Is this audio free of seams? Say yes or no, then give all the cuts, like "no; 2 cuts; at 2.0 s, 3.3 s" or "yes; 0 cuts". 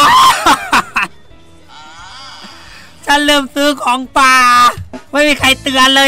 yes; 0 cuts